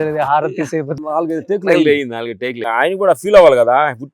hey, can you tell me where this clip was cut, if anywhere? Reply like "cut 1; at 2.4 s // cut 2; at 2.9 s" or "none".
cut 1; at 0.9 s // cut 2; at 2.6 s